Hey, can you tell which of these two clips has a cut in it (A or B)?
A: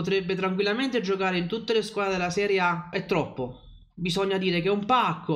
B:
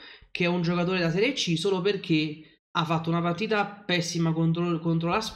A